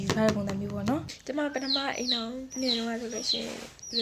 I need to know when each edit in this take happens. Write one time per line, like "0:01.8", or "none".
0:01.1